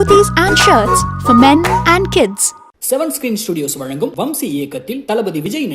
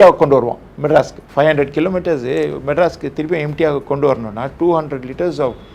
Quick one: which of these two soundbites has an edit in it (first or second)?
second